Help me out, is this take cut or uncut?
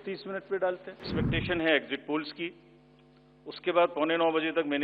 cut